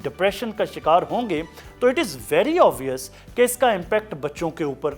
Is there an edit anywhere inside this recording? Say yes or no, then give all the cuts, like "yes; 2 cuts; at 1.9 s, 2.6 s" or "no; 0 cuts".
no; 0 cuts